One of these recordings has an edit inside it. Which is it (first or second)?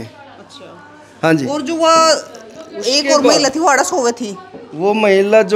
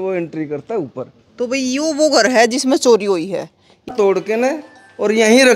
second